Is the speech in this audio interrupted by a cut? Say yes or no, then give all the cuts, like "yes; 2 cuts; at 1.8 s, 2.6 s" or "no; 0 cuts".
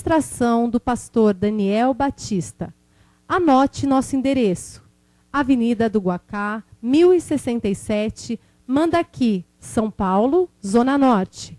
no; 0 cuts